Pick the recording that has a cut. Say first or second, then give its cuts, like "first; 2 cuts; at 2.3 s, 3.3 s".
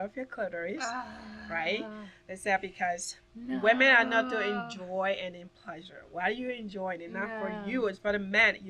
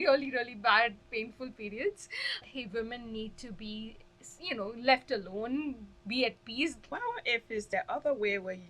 second; 2 cuts; at 2.5 s, 7.0 s